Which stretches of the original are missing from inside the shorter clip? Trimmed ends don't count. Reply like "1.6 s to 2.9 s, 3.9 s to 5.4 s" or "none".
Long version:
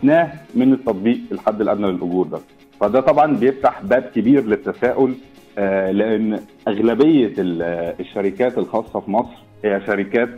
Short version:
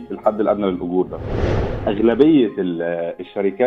2.8 s to 6.4 s